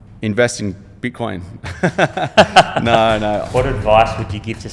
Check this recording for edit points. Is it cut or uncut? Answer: cut